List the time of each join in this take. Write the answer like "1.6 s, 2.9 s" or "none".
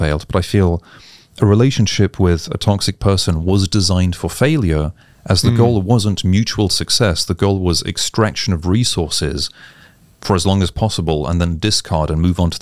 none